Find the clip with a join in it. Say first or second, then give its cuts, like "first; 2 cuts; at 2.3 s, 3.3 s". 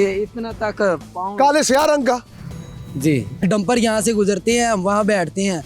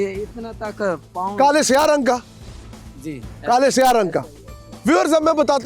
first; 1 cut; at 3.4 s